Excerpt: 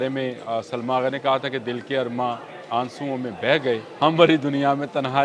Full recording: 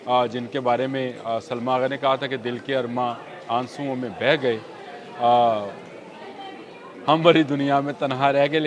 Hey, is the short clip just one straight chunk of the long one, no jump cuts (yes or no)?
no